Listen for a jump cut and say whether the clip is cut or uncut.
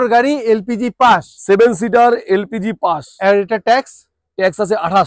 uncut